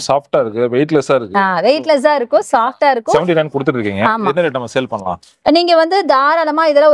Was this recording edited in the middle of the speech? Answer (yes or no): yes